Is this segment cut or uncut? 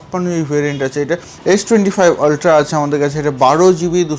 cut